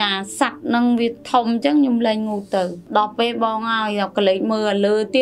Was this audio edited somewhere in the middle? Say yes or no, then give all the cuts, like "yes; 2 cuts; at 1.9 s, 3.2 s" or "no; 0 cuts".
yes; 1 cut; at 2.8 s